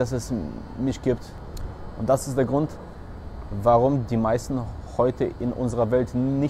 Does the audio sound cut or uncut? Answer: cut